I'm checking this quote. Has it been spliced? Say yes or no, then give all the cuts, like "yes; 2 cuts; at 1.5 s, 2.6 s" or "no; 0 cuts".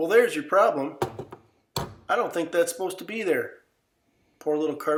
no; 0 cuts